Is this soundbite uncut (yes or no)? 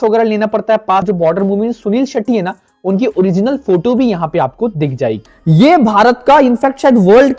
no